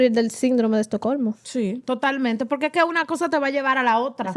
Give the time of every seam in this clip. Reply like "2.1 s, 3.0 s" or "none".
1.8 s